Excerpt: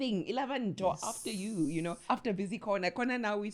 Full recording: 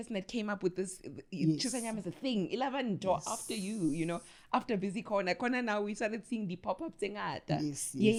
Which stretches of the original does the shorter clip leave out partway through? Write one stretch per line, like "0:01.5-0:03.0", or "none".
0:04.2-0:04.4